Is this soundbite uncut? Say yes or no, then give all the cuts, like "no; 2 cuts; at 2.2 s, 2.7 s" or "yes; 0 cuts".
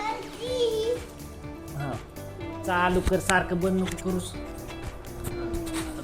no; 1 cut; at 2.7 s